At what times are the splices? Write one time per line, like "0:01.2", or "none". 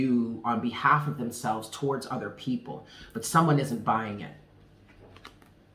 none